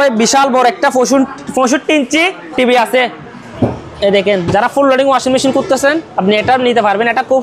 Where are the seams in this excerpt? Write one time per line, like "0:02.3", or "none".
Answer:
0:03.5